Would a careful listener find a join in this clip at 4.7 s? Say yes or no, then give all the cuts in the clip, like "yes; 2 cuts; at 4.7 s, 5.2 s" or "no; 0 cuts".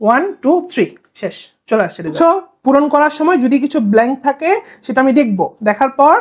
no; 1 cut; at 2.5 s